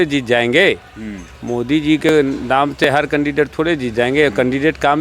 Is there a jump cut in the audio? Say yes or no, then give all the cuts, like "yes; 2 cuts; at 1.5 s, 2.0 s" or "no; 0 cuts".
no; 0 cuts